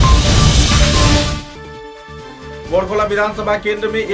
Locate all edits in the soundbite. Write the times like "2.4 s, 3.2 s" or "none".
none